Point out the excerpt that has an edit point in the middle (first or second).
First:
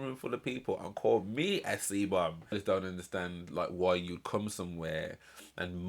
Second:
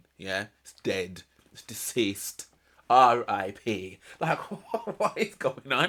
first